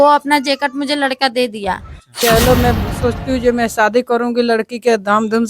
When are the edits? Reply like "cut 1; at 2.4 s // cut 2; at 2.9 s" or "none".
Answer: cut 1; at 2.1 s